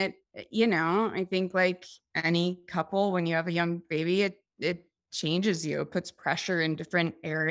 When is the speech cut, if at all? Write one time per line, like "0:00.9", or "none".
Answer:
none